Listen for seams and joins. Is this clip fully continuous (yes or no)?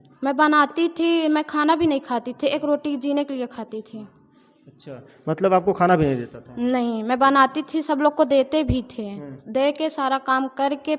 yes